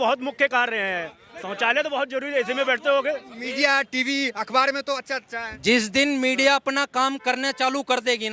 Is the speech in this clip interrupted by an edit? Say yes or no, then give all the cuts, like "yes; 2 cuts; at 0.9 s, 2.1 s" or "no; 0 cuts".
yes; 1 cut; at 3.4 s